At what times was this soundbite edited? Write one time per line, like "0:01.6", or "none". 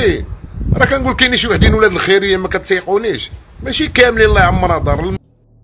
none